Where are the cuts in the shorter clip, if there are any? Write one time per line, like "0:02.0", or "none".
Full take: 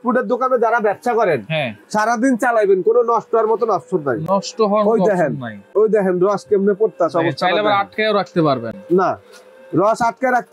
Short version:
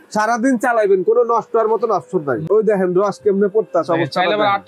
0:02.4

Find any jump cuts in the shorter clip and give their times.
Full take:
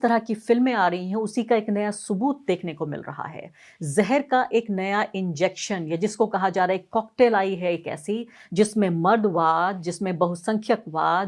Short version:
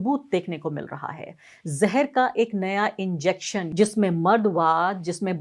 0:03.6

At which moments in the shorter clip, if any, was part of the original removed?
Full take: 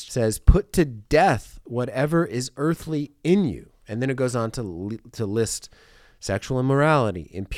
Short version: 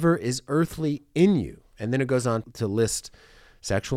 0:02.5

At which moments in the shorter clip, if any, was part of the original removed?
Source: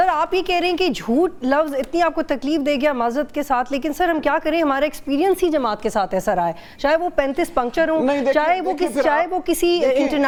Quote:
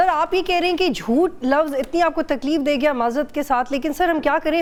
none

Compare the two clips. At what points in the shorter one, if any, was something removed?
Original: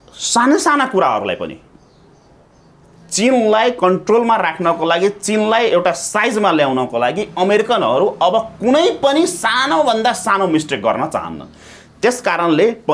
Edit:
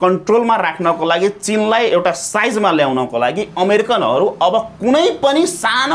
none

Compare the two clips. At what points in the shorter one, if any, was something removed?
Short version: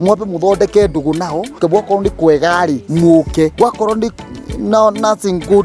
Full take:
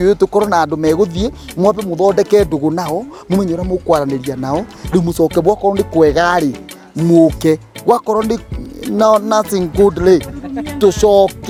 0:01.6
0:02.8
0:03.5

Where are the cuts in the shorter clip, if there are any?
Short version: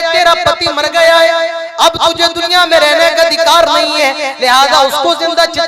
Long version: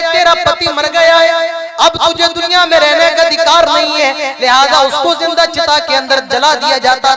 none

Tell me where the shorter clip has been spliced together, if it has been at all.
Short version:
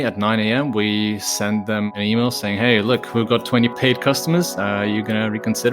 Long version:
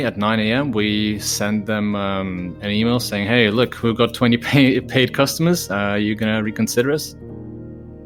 0:01.9
0:03.8

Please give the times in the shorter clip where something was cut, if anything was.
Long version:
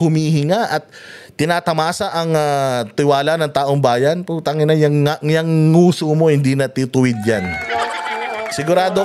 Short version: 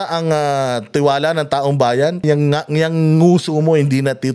0:02.2

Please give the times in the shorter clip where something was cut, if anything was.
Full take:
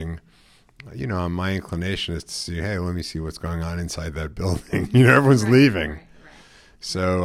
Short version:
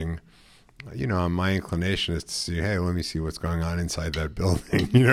none

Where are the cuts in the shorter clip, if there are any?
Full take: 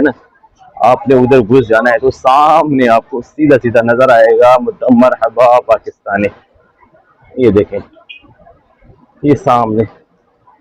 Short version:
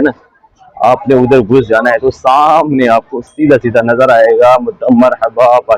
none

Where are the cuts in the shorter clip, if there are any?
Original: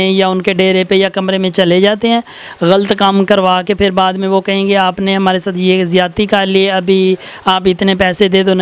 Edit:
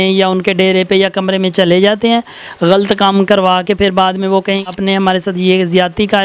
0:04.7

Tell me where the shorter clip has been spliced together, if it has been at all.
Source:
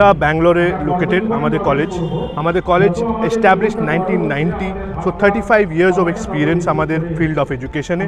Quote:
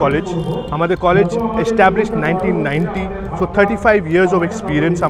none

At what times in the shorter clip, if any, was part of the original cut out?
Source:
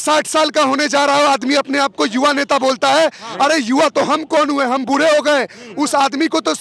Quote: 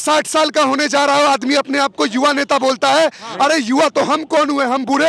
none

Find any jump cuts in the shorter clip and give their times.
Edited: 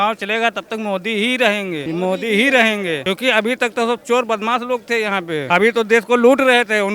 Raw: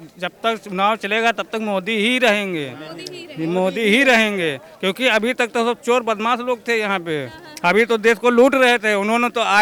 0:01.8
0:03.0
0:05.4

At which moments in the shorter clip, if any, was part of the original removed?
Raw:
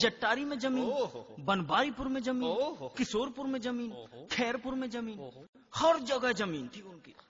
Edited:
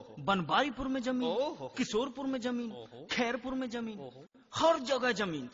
none

